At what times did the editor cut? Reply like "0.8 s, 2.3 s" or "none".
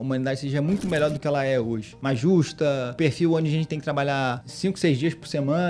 1.9 s, 2.9 s, 4.5 s